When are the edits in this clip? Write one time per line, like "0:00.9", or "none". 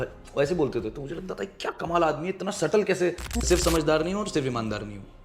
0:03.3